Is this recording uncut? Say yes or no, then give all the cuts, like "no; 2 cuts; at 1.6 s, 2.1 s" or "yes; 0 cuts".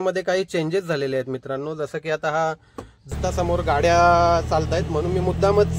no; 1 cut; at 3.1 s